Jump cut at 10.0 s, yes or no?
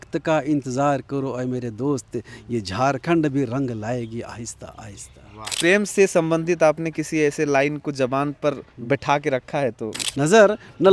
yes